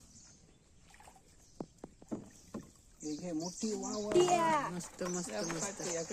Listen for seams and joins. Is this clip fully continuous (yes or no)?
yes